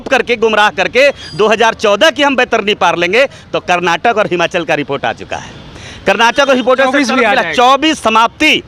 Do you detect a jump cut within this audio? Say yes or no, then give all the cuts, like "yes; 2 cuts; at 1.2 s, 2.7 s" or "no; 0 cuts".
no; 0 cuts